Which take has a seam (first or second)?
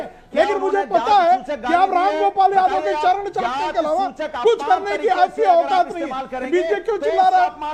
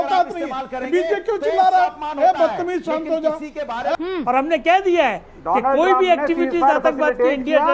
second